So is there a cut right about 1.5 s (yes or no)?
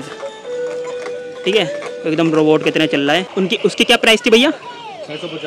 no